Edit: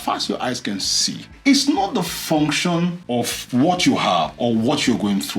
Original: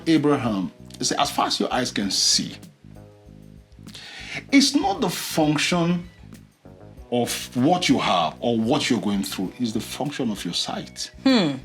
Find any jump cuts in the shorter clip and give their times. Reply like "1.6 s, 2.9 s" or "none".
1.3 s, 3.0 s